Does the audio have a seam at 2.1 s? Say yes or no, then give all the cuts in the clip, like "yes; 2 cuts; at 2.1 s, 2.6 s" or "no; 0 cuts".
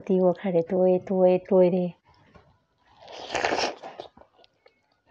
no; 0 cuts